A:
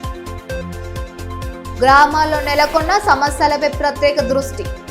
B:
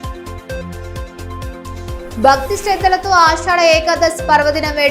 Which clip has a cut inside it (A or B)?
A